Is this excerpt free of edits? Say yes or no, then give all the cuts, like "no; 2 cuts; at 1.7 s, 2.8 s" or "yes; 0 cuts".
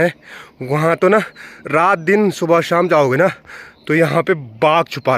yes; 0 cuts